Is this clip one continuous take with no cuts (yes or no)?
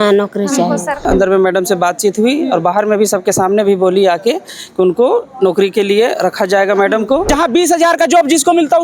no